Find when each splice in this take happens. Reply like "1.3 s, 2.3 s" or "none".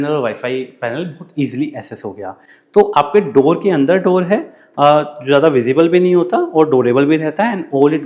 none